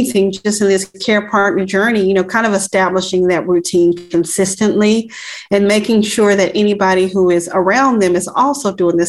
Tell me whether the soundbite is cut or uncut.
uncut